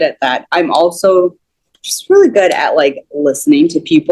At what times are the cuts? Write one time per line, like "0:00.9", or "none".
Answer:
none